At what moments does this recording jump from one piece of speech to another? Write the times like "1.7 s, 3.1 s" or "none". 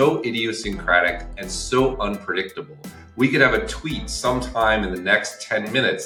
none